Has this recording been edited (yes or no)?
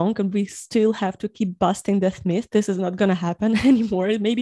no